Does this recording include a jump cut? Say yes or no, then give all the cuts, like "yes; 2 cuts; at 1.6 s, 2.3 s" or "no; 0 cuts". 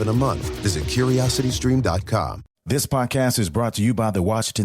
yes; 1 cut; at 2.6 s